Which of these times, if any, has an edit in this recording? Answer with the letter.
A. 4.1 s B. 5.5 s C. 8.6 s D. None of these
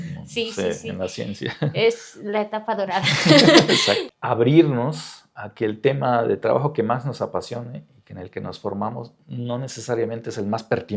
A